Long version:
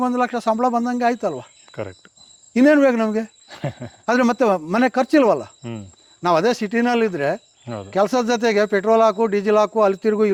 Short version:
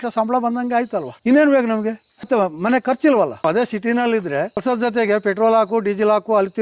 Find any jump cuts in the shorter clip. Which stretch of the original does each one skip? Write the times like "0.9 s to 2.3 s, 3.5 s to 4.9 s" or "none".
1.4 s to 2.4 s, 3.6 s to 4.3 s, 5.5 s to 6.3 s, 7.5 s to 8.1 s